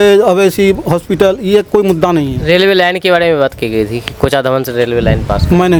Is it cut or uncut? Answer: uncut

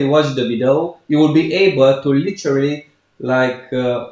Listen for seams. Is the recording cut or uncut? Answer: uncut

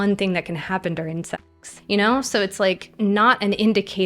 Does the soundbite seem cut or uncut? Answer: cut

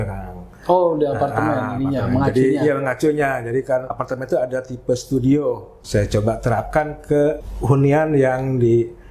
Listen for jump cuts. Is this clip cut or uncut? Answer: cut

